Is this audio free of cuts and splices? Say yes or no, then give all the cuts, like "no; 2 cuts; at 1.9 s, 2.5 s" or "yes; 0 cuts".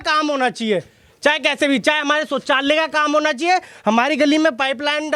yes; 0 cuts